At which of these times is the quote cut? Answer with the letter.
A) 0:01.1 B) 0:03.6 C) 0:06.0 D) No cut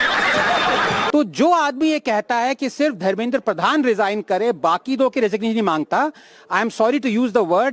A